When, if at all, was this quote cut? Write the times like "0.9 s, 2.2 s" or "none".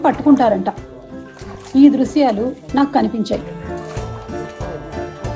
none